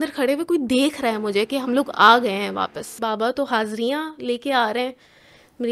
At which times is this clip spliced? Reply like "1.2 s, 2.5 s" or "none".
3.0 s